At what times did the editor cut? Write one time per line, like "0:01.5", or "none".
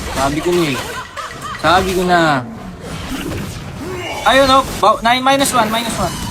0:03.1